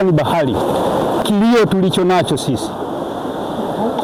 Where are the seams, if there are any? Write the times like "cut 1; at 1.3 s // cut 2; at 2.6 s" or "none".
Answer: none